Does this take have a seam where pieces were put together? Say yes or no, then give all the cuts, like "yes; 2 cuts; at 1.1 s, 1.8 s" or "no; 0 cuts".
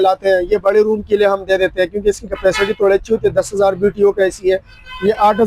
no; 0 cuts